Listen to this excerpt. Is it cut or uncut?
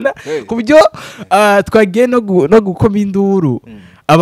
uncut